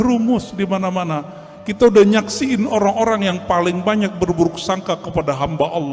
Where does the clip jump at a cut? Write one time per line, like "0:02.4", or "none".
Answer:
none